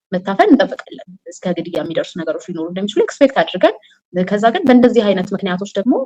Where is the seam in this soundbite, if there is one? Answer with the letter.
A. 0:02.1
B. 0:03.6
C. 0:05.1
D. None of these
D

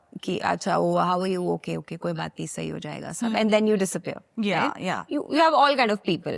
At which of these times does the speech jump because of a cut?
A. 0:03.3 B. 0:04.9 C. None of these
C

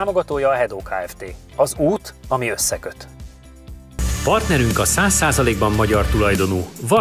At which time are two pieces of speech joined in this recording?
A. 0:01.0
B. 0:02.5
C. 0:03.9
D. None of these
C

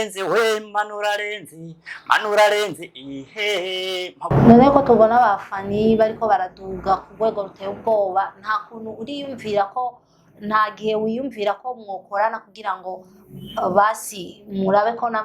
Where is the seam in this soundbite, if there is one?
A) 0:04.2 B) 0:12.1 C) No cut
A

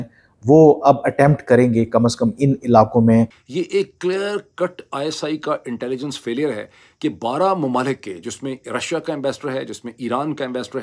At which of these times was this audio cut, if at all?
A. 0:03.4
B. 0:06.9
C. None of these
A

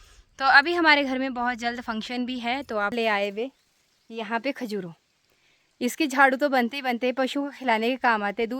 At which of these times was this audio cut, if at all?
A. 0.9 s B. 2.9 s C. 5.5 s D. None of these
B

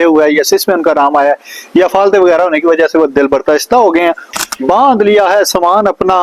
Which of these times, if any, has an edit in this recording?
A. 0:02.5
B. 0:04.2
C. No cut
B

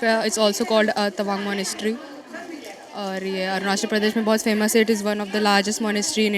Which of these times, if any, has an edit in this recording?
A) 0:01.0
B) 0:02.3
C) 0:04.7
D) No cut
D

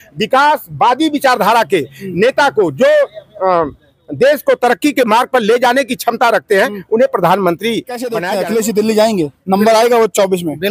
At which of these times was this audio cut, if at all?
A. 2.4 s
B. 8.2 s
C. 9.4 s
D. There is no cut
B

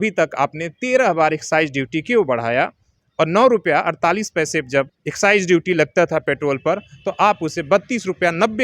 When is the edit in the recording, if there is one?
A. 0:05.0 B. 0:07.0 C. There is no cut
A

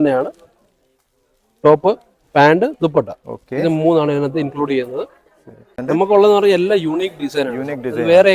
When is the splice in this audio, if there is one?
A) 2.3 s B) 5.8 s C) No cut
B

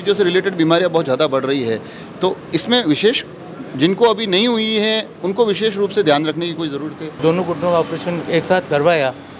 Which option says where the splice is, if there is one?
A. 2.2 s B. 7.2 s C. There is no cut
B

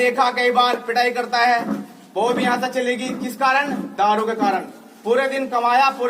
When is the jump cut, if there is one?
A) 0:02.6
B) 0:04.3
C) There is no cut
C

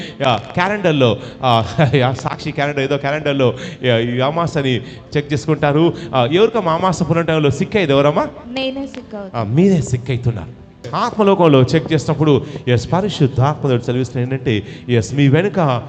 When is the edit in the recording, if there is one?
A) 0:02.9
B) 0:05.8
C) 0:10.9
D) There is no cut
C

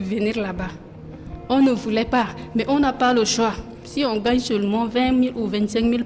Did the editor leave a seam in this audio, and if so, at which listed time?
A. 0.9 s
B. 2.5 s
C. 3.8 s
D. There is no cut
C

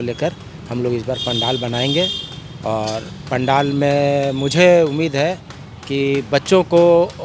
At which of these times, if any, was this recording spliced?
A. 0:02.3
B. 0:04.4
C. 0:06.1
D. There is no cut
D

